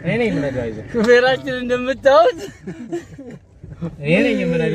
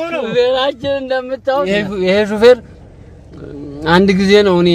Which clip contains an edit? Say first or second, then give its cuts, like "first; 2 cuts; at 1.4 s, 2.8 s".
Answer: second; 1 cut; at 1.7 s